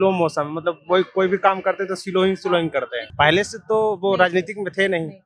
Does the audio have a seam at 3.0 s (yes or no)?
yes